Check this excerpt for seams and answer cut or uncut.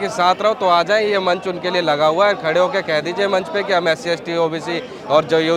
uncut